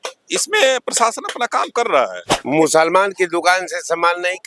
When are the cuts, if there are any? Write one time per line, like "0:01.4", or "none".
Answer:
0:02.3